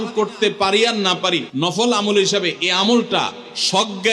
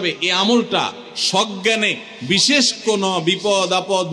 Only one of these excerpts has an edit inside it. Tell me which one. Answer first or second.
first